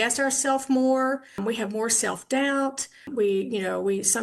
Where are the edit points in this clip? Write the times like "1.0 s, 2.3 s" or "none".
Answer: 1.4 s, 3.1 s